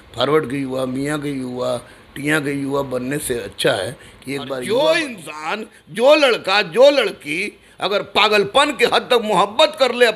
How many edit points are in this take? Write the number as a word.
one